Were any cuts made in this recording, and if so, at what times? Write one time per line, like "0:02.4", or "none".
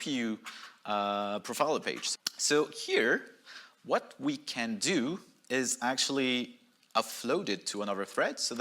0:02.0